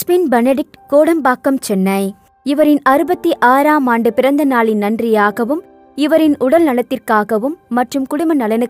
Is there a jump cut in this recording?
no; 0 cuts

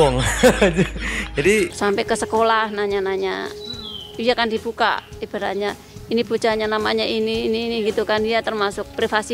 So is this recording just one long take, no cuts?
no; 1 cut; at 1.7 s

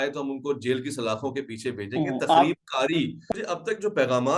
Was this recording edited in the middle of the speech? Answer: yes; 1 cut; at 3.3 s

